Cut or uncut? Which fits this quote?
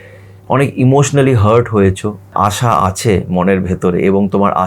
cut